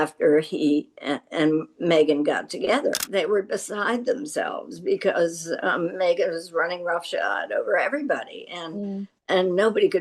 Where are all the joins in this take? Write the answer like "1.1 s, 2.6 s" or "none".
3.0 s